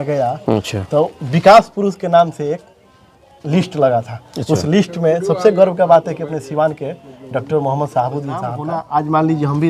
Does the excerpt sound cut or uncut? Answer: cut